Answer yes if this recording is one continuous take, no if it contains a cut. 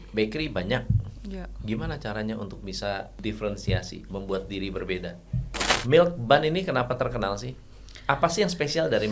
no